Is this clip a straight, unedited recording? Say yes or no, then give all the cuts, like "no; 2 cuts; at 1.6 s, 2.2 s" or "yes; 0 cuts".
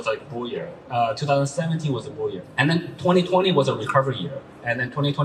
no; 1 cut; at 2.4 s